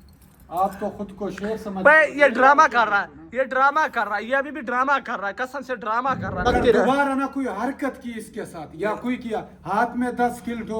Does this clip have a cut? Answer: yes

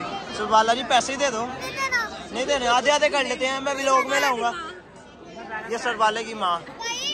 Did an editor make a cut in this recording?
no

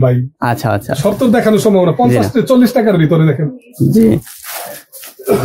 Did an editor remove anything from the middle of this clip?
no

